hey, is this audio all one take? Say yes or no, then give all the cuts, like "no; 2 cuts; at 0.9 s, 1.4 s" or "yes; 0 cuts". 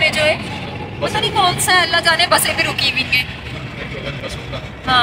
yes; 0 cuts